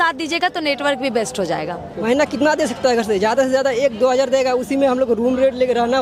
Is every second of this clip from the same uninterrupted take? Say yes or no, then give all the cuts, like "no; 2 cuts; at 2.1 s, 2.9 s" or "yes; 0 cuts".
no; 1 cut; at 2.0 s